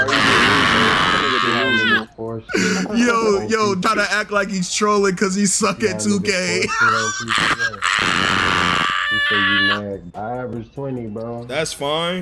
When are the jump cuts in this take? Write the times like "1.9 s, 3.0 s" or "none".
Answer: 10.1 s

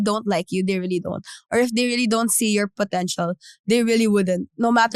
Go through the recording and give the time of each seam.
none

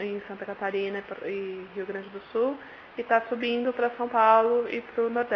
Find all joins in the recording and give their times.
3.3 s

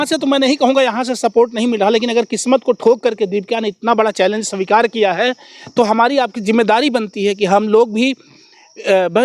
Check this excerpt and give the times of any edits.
none

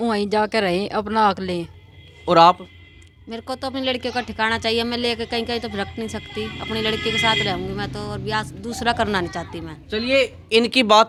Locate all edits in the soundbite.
none

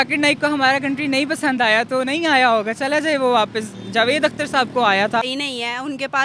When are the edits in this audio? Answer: 5.3 s

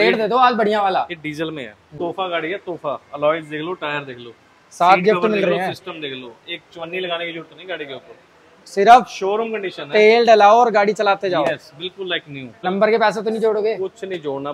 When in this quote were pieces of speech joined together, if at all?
1.8 s, 12.6 s

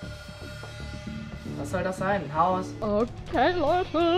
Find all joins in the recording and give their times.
2.8 s

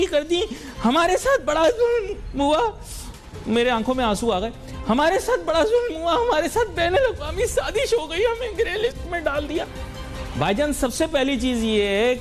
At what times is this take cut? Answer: none

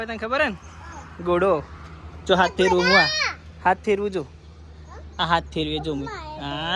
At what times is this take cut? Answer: none

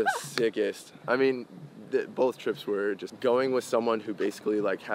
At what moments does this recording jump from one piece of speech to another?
3.1 s

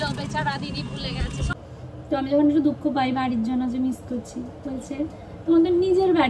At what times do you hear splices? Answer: 1.5 s

